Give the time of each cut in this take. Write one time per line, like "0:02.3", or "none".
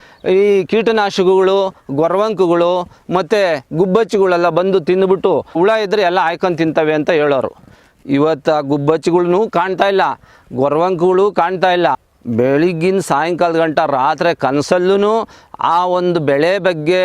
0:05.6
0:12.1